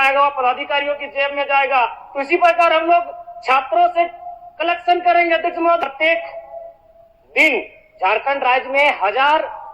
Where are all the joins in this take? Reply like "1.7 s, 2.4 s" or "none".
5.8 s